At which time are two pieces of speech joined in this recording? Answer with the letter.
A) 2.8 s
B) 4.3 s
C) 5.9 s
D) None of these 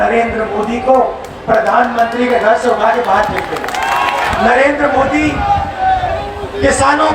B